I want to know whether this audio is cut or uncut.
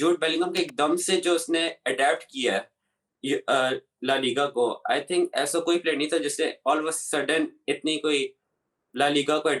uncut